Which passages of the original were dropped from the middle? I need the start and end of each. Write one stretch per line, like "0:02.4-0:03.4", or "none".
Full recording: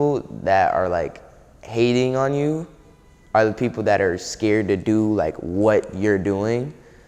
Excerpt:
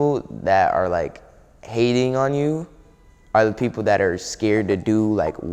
none